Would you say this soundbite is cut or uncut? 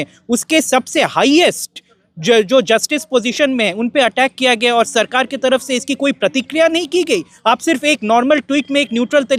uncut